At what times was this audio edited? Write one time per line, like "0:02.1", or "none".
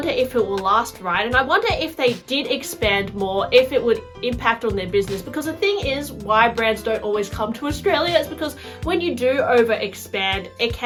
none